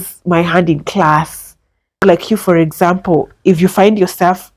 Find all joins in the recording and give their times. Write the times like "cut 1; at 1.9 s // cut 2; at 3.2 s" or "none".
cut 1; at 2.0 s